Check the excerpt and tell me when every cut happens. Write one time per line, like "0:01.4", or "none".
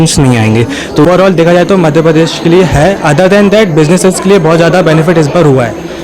0:01.0